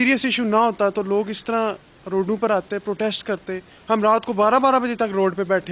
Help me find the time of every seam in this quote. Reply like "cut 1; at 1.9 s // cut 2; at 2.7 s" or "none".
none